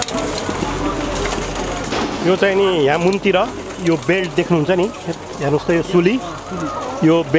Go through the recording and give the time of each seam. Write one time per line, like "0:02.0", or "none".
0:02.1